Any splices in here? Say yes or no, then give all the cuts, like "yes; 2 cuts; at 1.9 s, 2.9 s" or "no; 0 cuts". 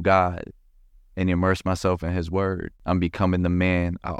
yes; 1 cut; at 2.7 s